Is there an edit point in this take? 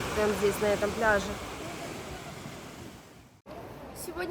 no; 0 cuts

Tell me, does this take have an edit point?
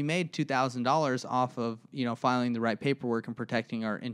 no; 0 cuts

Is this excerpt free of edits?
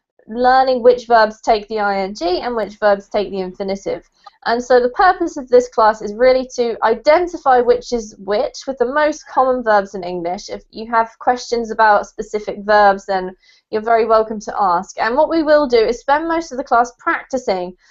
yes; 0 cuts

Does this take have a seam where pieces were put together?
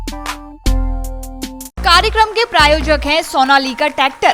yes; 1 cut; at 1.7 s

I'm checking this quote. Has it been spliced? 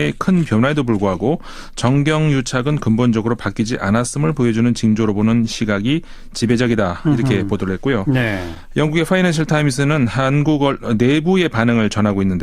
yes; 1 cut; at 8.4 s

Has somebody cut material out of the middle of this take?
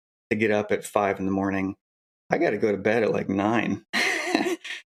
no; 0 cuts

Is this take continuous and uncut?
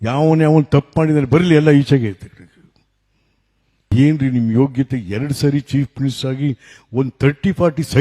no; 1 cut; at 3.9 s

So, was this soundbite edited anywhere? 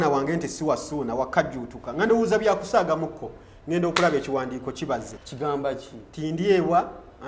yes; 1 cut; at 5.2 s

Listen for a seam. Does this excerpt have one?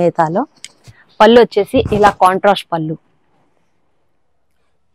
no; 0 cuts

